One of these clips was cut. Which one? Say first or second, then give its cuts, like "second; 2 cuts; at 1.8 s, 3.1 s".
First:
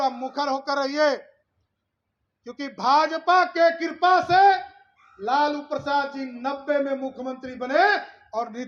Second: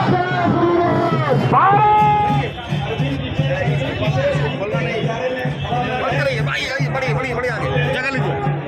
second; 1 cut; at 2.3 s